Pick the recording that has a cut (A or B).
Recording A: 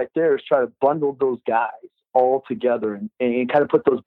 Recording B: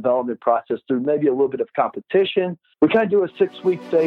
B